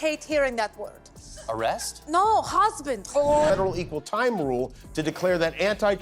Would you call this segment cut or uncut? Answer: cut